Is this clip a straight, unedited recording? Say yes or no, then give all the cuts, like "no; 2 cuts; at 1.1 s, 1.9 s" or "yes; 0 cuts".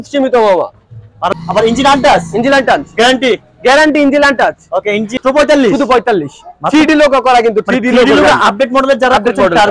no; 2 cuts; at 1.3 s, 5.1 s